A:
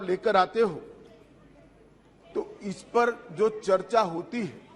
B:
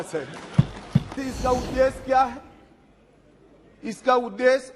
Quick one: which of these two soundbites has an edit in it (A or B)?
B